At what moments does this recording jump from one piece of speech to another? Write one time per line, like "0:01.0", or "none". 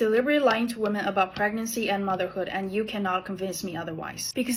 none